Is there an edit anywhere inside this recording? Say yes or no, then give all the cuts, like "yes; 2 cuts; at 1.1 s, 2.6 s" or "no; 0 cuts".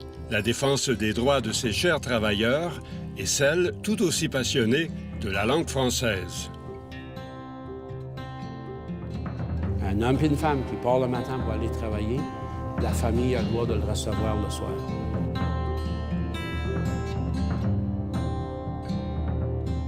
yes; 1 cut; at 12.1 s